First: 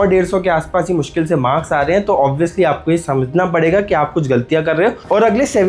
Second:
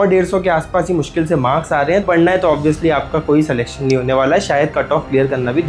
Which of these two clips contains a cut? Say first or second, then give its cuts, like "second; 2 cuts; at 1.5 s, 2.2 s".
second; 1 cut; at 2.0 s